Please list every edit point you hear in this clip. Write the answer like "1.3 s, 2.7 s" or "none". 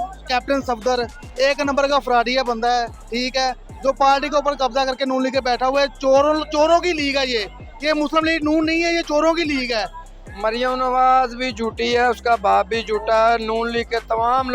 10.2 s